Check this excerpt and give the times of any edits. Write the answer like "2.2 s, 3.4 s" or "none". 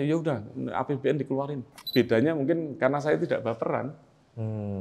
1.8 s